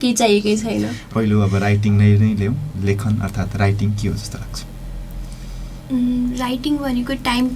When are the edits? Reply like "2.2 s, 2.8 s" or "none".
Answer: 1.0 s